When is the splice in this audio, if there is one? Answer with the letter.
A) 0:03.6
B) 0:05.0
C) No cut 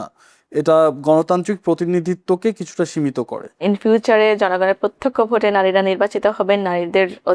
A